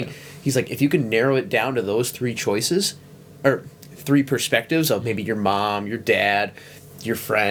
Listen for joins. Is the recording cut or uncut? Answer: uncut